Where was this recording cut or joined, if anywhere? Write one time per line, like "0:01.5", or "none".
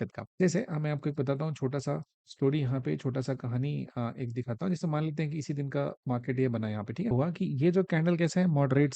0:07.1

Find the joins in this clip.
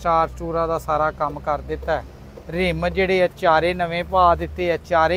none

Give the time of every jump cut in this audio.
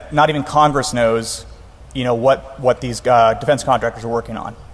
none

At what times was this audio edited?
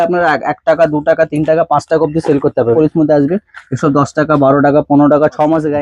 0:02.7

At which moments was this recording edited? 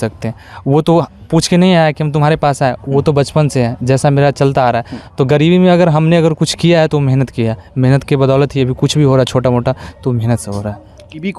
none

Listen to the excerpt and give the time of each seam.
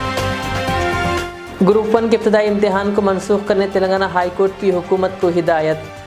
0:01.3

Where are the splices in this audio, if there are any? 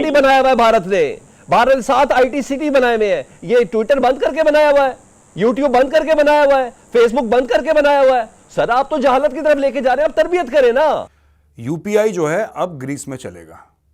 0:11.2

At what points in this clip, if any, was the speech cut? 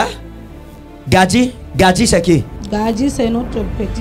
0:02.5

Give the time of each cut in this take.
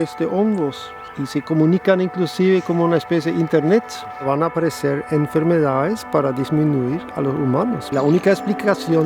0:01.0
0:04.2
0:07.9

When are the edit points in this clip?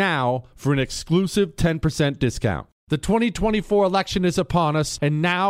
0:02.7

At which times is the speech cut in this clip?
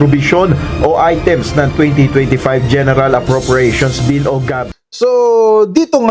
0:04.6

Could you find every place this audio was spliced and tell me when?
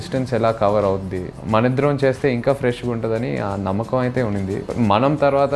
0:01.3
0:04.6

